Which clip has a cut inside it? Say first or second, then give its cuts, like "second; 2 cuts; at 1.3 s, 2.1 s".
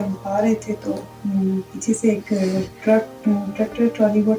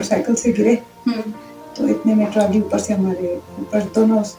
first; 2 cuts; at 1.1 s, 2.7 s